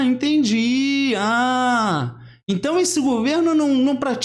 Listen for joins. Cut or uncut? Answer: uncut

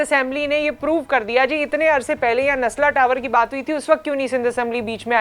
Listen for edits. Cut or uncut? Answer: uncut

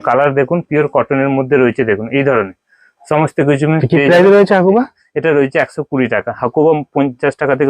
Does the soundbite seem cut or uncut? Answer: uncut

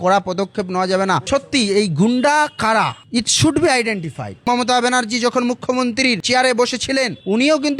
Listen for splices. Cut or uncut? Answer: cut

